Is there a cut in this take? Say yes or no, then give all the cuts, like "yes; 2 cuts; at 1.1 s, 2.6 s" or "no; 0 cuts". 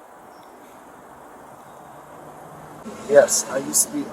yes; 1 cut; at 2.8 s